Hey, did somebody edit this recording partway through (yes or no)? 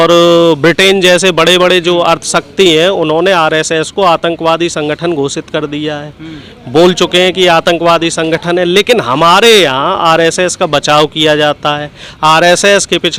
no